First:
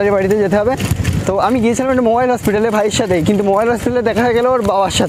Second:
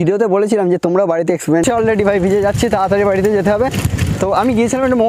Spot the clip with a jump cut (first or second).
second